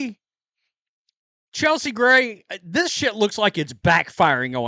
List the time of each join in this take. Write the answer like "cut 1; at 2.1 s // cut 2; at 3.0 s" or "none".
cut 1; at 3.3 s